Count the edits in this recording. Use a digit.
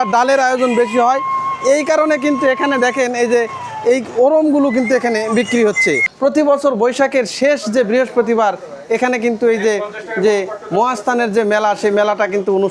1